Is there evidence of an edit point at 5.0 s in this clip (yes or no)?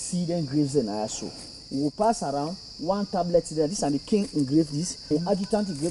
yes